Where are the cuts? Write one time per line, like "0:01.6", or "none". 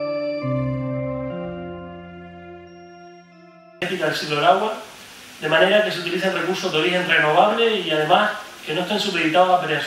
none